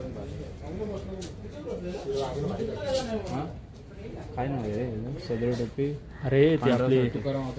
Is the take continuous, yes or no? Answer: yes